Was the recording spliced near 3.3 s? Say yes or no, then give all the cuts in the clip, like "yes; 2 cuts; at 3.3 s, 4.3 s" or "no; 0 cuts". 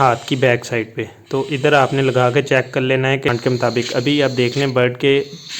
yes; 1 cut; at 3.3 s